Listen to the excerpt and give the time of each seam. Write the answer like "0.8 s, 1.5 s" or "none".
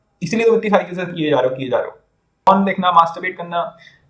2.5 s